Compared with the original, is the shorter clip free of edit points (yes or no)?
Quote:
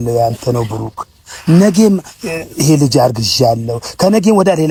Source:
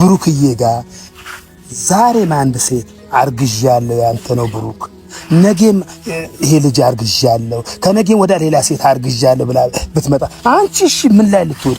yes